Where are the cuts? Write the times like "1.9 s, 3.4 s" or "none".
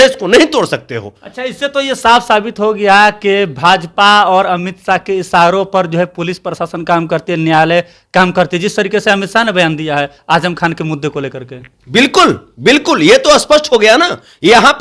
none